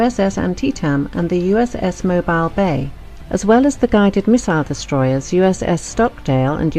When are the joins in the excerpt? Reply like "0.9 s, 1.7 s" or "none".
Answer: 4.7 s